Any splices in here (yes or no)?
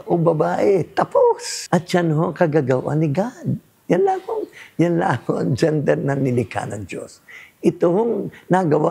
yes